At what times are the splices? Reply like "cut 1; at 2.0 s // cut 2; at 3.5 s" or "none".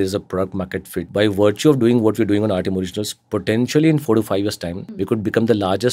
cut 1; at 1.1 s // cut 2; at 5.0 s